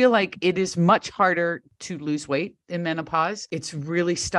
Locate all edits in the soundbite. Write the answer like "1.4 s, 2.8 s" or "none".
3.4 s